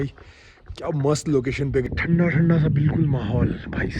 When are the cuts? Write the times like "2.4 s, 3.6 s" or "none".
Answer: 1.9 s

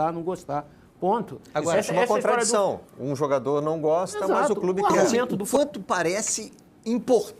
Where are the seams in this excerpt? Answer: 5.4 s

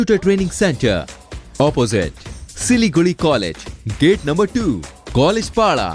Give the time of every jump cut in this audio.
none

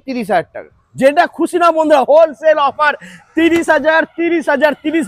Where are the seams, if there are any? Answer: none

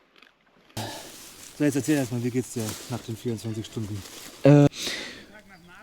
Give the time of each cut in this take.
0.8 s, 4.7 s

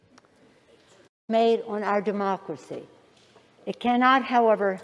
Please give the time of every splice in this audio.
1.1 s

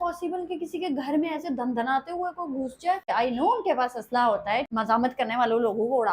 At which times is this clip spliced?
3.1 s, 4.7 s

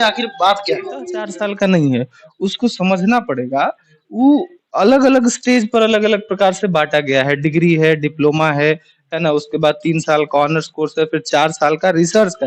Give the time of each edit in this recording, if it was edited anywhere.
1.2 s

